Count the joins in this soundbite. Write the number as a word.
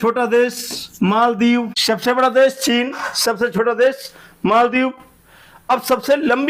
one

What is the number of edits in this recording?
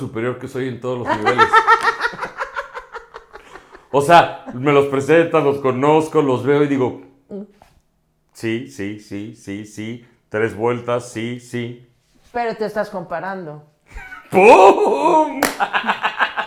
zero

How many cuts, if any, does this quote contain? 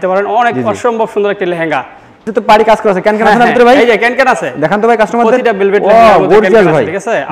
one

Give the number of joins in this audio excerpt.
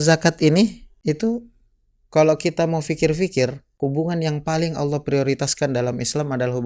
two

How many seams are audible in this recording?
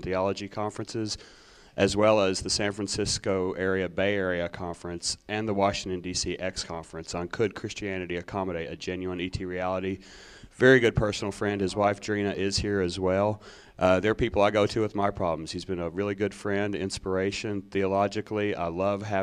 zero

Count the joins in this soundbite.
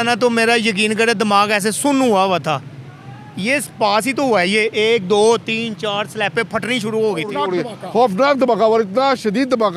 one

